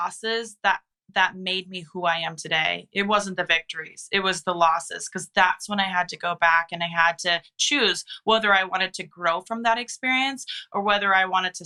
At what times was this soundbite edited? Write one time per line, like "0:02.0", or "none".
none